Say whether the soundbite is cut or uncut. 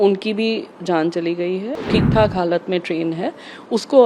cut